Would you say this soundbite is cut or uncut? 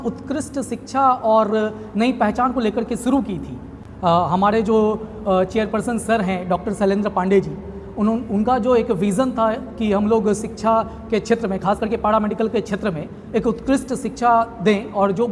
uncut